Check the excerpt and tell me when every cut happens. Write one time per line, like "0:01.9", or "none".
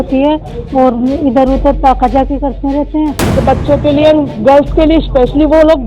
0:03.4